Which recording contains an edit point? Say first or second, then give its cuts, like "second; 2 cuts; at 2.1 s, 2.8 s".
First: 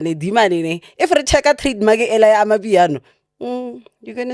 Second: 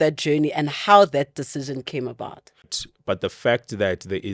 second; 1 cut; at 2.8 s